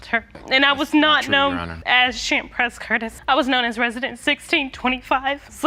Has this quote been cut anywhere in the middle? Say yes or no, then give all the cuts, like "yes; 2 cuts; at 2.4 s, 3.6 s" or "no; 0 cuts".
no; 0 cuts